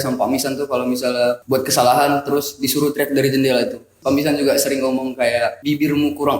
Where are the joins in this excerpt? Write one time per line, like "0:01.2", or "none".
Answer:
0:01.4
0:03.9
0:05.6